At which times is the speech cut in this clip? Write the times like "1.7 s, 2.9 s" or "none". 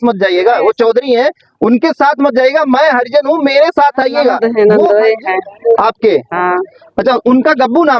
4.4 s